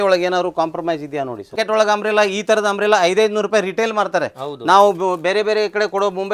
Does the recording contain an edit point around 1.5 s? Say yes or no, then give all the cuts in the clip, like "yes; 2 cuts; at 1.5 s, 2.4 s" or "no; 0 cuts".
yes; 1 cut; at 1.5 s